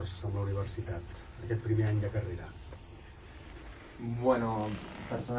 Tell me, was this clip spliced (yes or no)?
no